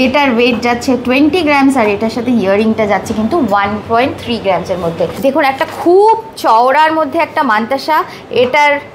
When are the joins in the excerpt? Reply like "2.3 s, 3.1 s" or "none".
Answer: 5.1 s